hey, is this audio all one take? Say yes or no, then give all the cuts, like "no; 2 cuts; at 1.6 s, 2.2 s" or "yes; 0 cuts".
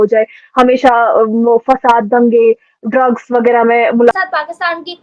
no; 1 cut; at 4.1 s